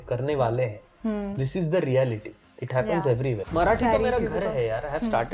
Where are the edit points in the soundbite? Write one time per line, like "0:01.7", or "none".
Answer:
0:03.5